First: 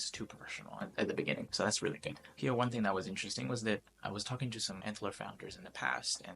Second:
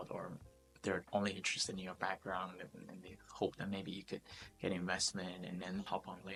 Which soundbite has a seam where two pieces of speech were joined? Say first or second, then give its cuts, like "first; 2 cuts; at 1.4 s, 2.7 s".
first; 1 cut; at 2.2 s